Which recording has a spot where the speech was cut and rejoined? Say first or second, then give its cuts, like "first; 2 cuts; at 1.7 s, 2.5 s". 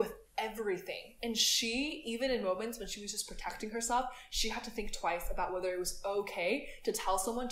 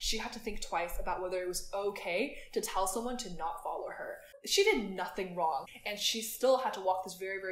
second; 2 cuts; at 4.2 s, 5.6 s